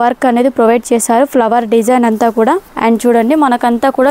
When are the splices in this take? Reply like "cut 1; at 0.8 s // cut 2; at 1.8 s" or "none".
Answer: cut 1; at 2.7 s